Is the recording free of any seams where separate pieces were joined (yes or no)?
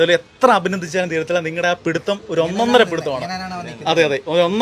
yes